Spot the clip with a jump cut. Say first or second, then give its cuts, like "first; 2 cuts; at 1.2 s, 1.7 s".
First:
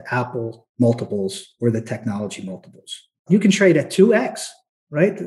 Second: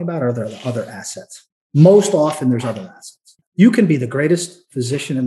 second; 2 cuts; at 1.6 s, 3.4 s